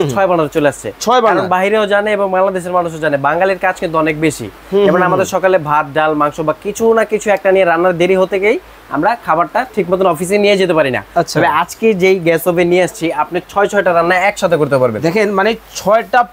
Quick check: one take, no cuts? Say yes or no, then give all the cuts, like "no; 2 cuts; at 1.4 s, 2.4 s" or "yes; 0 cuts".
yes; 0 cuts